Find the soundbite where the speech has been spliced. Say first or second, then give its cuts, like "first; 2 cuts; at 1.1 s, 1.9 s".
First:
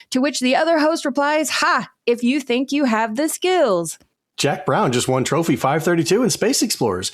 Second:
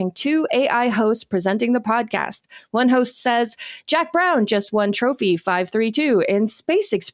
first; 1 cut; at 4.3 s